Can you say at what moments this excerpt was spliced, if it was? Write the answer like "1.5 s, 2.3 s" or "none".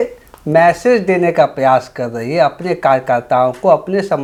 none